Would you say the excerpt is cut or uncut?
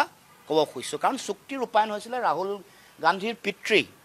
uncut